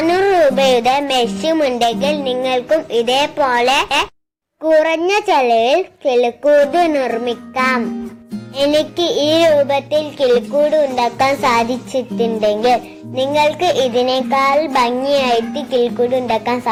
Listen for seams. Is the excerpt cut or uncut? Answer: uncut